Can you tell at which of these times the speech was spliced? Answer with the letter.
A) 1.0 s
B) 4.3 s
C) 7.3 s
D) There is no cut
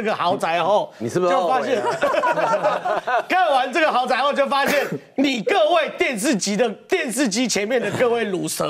D